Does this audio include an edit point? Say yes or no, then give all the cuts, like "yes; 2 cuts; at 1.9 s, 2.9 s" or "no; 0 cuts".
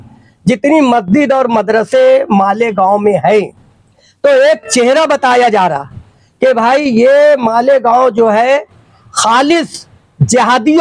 no; 0 cuts